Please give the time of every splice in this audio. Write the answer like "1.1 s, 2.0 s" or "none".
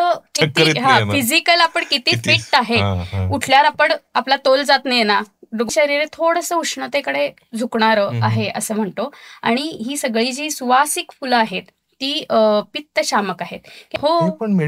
5.7 s, 13.8 s